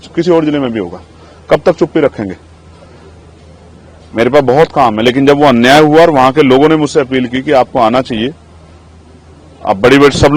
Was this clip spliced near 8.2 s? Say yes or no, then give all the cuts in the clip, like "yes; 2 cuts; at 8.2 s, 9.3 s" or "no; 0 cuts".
no; 0 cuts